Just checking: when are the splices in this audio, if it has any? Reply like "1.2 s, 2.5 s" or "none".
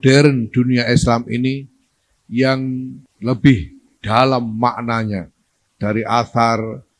3.0 s

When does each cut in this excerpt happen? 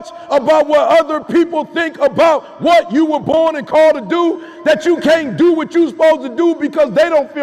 none

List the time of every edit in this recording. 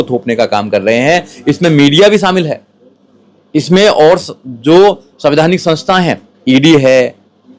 none

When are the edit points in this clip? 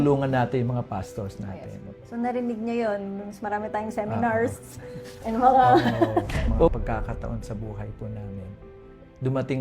6.7 s

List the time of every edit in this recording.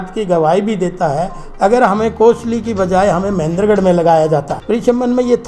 4.5 s

